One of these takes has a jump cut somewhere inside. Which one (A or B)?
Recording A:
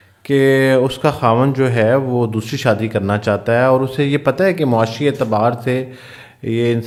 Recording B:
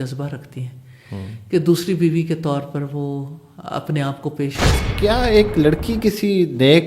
B